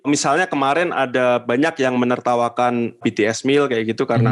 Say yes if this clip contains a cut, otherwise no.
yes